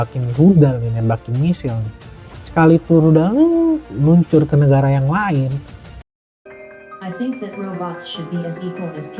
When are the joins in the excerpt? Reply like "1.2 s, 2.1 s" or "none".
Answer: 6.4 s